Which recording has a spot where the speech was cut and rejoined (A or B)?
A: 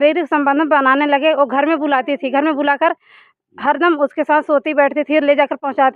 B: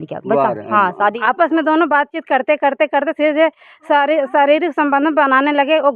B